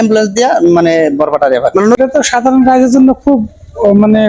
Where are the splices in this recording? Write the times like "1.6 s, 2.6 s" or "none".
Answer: 2.0 s